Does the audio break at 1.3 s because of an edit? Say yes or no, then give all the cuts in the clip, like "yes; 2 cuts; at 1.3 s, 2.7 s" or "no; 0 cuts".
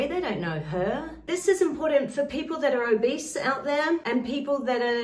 yes; 2 cuts; at 1.3 s, 4.0 s